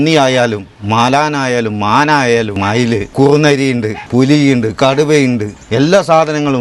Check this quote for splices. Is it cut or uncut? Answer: cut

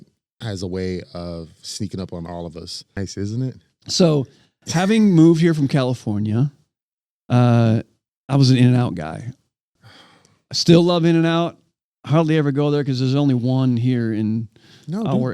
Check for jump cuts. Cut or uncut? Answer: cut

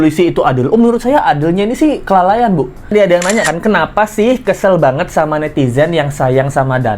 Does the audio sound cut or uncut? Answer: cut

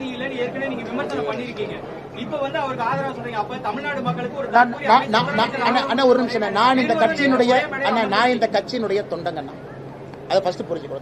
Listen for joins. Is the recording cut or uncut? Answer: uncut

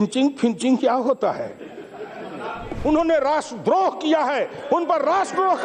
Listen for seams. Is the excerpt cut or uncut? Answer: cut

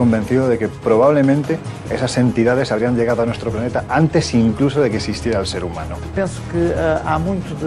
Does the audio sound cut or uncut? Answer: cut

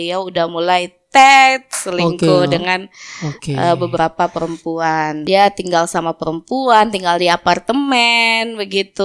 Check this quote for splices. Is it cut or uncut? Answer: cut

